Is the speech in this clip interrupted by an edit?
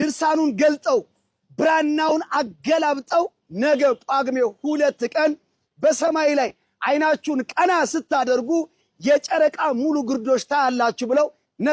no; 0 cuts

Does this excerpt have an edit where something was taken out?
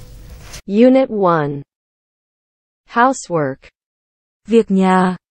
no; 0 cuts

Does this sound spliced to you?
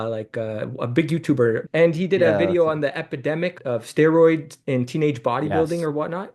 yes; 2 cuts; at 1.6 s, 3.5 s

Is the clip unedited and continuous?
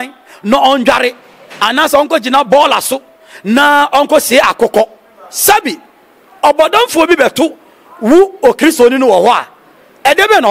yes; 0 cuts

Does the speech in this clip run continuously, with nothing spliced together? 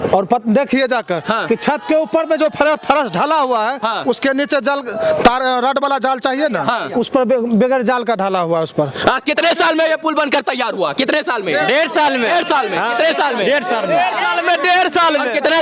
yes; 0 cuts

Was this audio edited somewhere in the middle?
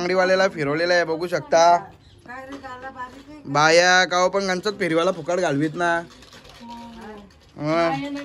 no; 0 cuts

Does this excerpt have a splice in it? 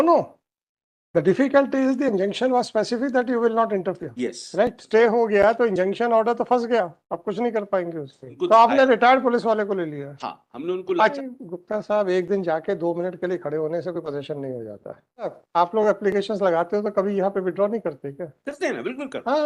yes; 4 cuts; at 4.8 s, 8.2 s, 11.1 s, 15.4 s

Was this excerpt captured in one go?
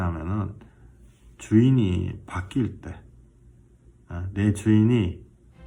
yes; 0 cuts

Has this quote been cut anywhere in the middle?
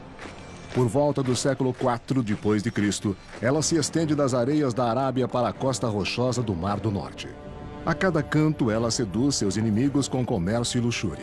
no; 0 cuts

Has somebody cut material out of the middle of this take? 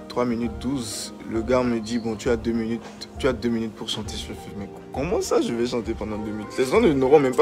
no; 0 cuts

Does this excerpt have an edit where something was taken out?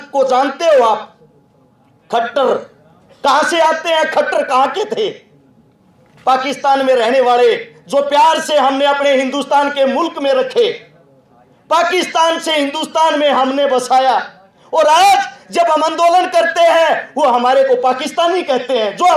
no; 0 cuts

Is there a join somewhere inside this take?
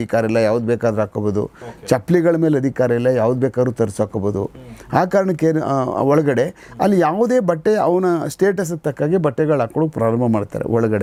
no; 0 cuts

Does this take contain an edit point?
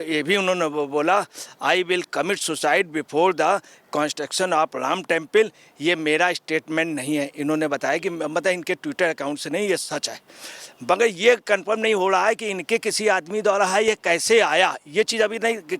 no; 0 cuts

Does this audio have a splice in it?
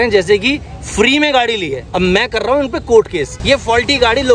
yes; 2 cuts; at 1.8 s, 3.3 s

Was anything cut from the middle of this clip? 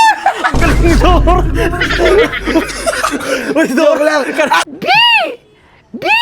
yes; 1 cut; at 4.7 s

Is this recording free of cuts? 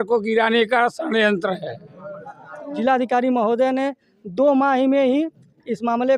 no; 1 cut; at 2.6 s

